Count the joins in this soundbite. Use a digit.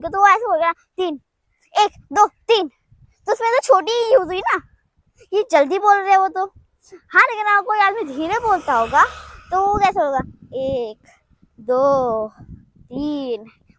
0